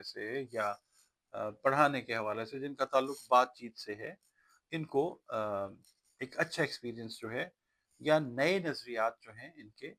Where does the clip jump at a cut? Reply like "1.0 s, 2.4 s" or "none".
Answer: none

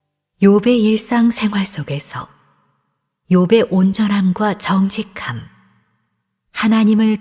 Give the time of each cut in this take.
1.6 s

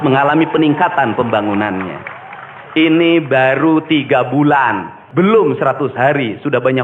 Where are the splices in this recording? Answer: 5.0 s

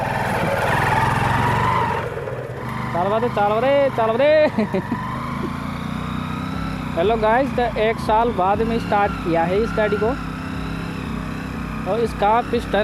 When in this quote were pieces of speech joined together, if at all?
2.7 s

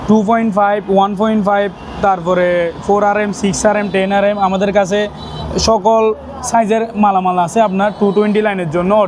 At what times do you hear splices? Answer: none

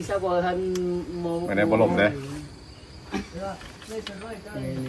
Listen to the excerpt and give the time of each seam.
none

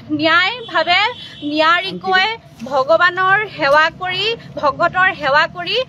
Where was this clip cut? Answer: none

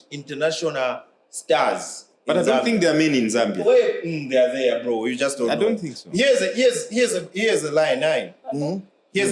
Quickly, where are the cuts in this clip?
none

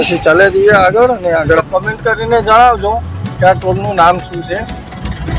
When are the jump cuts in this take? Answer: 1.6 s

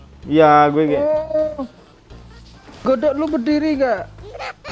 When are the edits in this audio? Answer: none

